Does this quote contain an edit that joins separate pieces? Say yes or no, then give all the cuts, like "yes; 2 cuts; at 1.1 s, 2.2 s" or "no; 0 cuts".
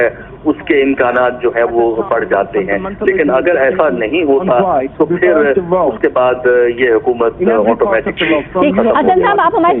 yes; 1 cut; at 1.6 s